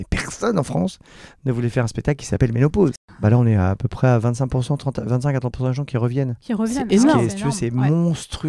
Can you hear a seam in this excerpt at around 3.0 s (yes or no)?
yes